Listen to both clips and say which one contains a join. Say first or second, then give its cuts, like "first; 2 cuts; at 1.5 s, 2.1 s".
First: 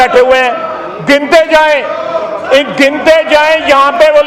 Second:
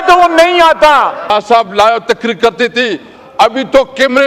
second; 1 cut; at 1.3 s